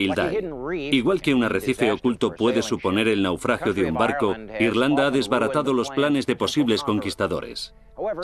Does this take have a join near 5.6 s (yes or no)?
no